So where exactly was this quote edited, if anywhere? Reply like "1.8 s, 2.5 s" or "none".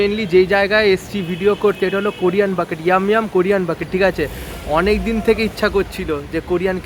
none